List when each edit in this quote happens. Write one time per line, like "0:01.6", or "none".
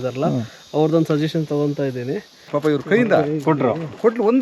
0:02.4